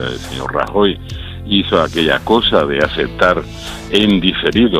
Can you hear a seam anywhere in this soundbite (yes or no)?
yes